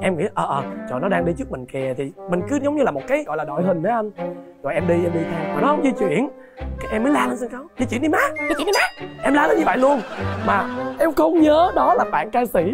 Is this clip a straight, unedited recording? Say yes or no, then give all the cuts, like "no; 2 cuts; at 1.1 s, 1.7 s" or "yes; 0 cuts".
yes; 0 cuts